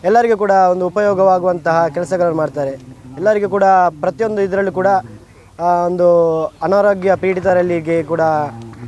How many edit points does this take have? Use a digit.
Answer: 0